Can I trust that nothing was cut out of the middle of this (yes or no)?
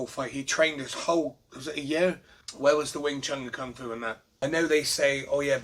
no